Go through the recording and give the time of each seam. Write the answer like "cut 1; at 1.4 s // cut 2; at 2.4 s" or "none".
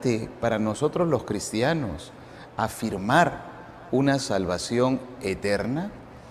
cut 1; at 3.5 s